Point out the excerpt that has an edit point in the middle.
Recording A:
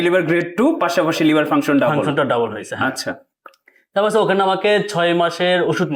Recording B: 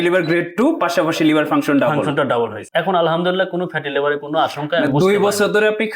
B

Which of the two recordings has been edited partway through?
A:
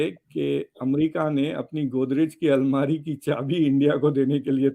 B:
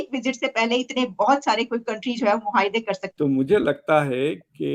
B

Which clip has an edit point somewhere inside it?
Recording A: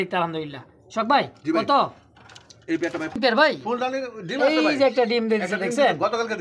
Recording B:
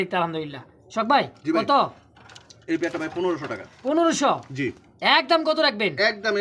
A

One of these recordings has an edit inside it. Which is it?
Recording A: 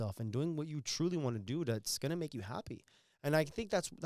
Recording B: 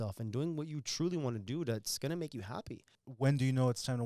B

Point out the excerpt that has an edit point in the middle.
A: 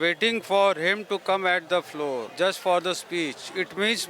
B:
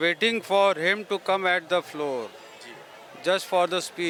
A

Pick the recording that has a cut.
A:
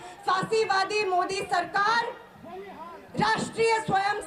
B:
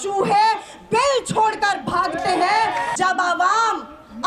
B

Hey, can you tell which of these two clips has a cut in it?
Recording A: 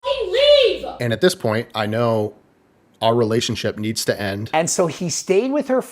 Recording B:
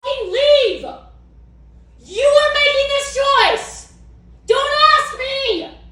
A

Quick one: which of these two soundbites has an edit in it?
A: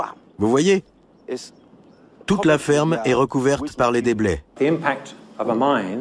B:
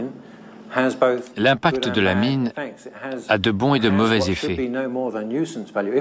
A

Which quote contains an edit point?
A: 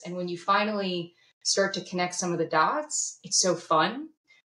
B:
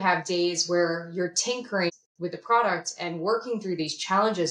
B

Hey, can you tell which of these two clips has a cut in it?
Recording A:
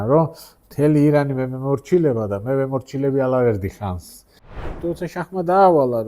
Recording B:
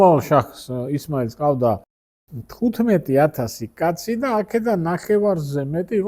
A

